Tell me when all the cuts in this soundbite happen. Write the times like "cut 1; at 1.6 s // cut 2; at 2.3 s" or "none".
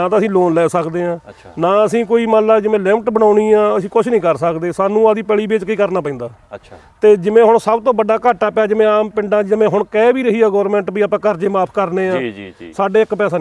none